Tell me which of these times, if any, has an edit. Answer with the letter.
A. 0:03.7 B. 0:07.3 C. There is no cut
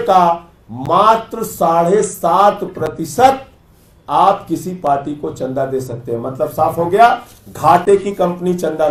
C